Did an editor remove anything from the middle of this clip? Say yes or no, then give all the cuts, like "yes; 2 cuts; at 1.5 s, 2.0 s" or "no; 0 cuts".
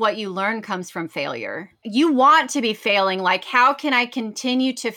yes; 1 cut; at 1.8 s